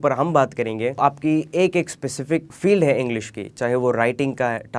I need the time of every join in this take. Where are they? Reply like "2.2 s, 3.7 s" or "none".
1.0 s, 2.5 s